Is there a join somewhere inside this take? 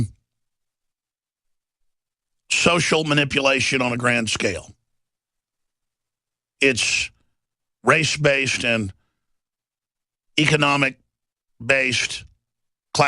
no; 0 cuts

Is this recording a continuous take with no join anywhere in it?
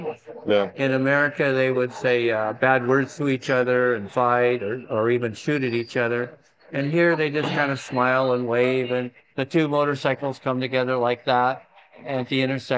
yes; 0 cuts

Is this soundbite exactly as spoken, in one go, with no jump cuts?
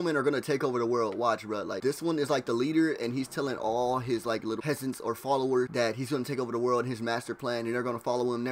no; 3 cuts; at 1.7 s, 4.6 s, 5.7 s

